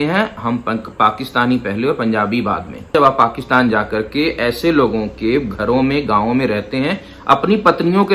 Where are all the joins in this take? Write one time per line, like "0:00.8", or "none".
0:02.9